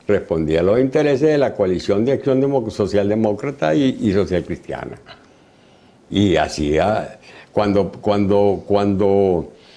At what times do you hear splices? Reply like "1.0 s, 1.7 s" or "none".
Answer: none